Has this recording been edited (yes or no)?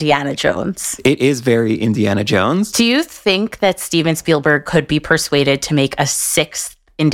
no